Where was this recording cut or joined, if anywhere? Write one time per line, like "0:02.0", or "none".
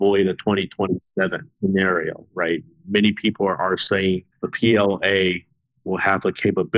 0:01.5
0:04.5